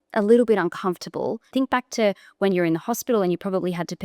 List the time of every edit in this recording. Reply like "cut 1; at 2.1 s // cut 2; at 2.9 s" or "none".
cut 1; at 1.5 s